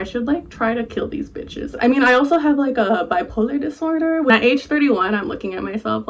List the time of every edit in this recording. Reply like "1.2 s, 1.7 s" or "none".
1.7 s, 4.3 s